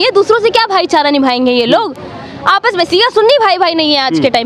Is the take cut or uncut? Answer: uncut